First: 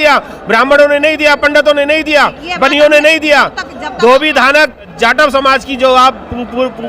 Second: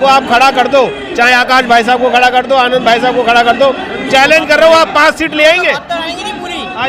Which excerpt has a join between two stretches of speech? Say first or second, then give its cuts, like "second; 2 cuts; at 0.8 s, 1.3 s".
first; 1 cut; at 4.9 s